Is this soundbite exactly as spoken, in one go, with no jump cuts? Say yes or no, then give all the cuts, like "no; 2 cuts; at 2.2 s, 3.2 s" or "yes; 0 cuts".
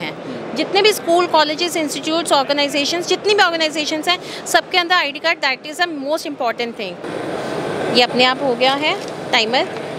no; 1 cut; at 7.1 s